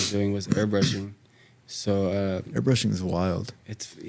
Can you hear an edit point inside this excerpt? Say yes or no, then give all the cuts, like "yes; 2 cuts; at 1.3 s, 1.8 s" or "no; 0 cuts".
no; 0 cuts